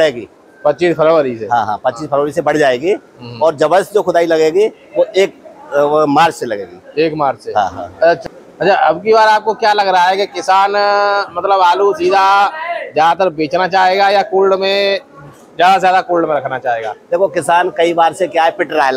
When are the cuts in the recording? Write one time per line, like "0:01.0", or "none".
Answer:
0:08.2